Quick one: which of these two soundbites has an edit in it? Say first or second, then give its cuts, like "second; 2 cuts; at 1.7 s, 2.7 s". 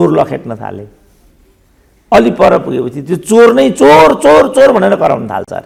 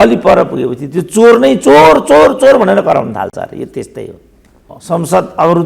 second; 1 cut; at 4.7 s